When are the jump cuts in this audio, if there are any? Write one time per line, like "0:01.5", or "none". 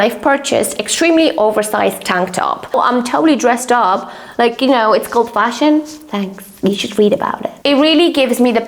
0:02.7
0:07.5